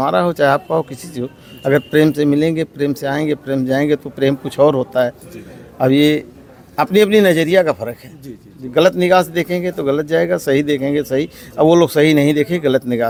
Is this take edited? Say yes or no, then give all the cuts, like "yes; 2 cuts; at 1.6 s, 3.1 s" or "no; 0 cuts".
no; 0 cuts